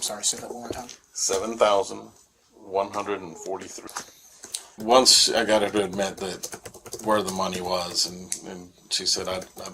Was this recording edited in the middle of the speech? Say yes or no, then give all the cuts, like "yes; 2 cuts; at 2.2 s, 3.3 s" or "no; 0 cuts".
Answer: yes; 1 cut; at 4.8 s